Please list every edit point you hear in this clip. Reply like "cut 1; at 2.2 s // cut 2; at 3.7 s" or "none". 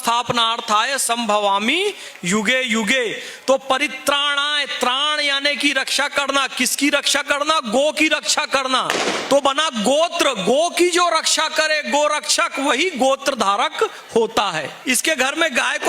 cut 1; at 14.7 s

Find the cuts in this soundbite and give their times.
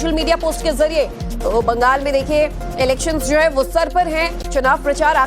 cut 1; at 3.9 s

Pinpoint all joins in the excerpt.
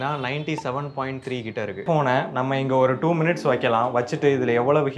cut 1; at 1.9 s

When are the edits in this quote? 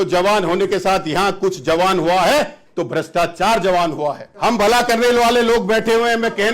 cut 1; at 4.3 s

